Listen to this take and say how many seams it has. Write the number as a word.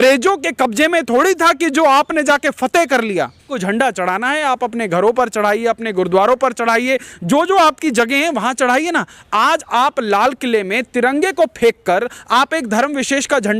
one